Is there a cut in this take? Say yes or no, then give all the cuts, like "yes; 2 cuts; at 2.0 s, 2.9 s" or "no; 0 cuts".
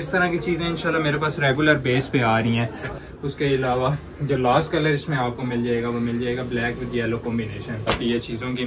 yes; 2 cuts; at 2.9 s, 7.9 s